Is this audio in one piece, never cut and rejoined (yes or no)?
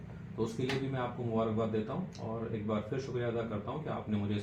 yes